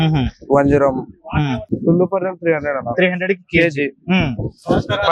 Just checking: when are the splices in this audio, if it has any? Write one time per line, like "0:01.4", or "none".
0:01.6